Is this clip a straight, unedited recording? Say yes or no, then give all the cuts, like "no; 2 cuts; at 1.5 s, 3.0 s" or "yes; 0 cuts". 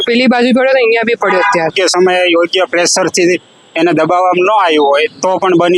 no; 1 cut; at 1.7 s